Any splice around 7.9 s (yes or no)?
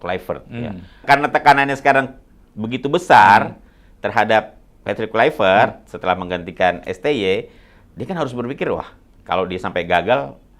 no